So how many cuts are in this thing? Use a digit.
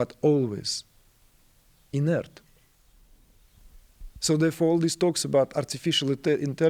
1